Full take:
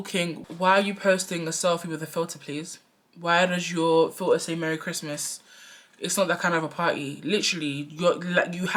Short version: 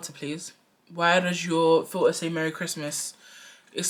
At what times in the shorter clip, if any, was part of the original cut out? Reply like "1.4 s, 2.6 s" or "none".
none